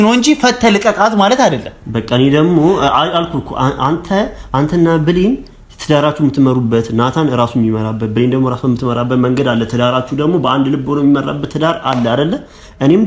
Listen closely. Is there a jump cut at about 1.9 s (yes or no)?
no